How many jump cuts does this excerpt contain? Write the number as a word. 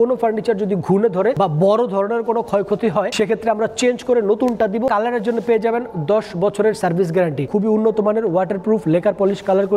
four